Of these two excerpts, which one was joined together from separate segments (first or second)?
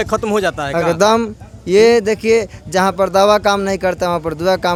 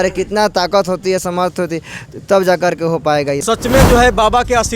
second